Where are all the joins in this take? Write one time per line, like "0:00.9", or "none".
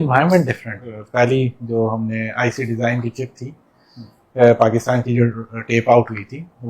0:01.0

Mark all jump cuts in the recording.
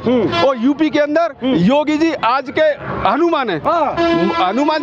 none

